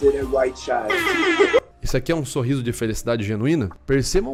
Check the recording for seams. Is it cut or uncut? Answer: uncut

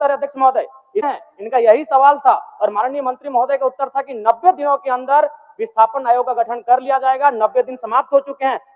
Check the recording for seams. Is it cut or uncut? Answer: uncut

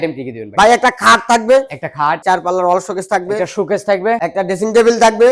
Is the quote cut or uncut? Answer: cut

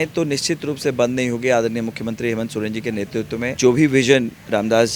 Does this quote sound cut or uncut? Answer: cut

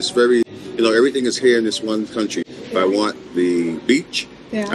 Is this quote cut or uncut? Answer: uncut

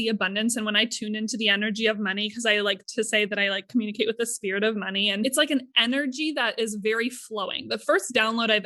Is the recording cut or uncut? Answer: uncut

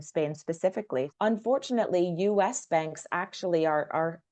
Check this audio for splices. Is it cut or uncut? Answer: cut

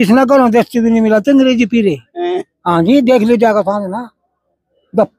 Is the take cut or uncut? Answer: uncut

